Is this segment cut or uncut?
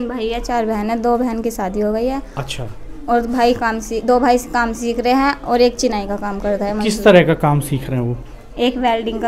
uncut